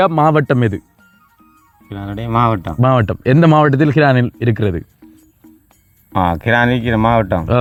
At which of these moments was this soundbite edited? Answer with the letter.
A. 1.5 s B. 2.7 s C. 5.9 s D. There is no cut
D